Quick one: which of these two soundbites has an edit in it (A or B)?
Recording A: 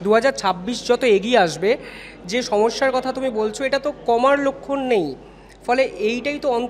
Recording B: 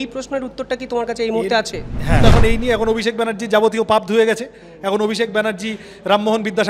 B